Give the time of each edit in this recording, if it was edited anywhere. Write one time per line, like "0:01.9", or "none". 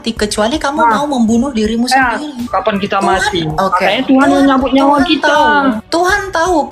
0:02.4
0:05.8